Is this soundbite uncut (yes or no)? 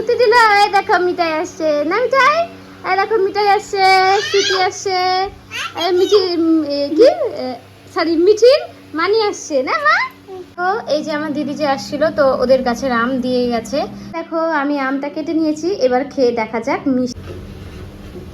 no